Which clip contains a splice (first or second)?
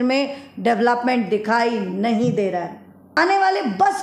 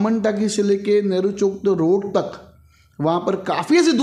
first